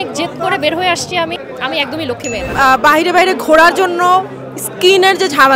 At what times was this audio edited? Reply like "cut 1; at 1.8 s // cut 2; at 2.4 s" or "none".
cut 1; at 1.4 s // cut 2; at 2.5 s